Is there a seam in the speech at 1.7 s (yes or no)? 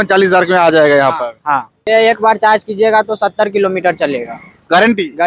yes